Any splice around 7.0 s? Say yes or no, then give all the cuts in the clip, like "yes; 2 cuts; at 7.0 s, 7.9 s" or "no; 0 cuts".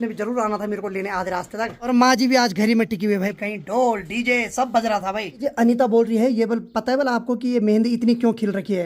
no; 3 cuts; at 1.8 s, 3.4 s, 5.4 s